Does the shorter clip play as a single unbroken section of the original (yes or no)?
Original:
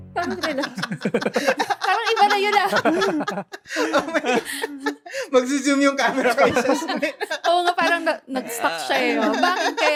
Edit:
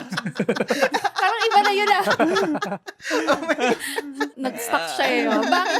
no